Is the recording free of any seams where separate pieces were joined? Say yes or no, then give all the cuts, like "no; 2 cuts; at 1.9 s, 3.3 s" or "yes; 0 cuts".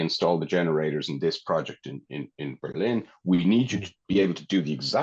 yes; 0 cuts